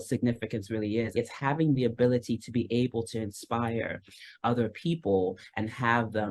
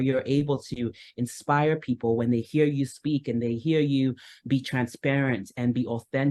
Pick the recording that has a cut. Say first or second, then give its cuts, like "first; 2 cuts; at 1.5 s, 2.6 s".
first; 1 cut; at 1.2 s